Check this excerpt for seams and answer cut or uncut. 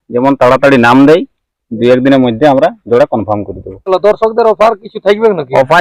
cut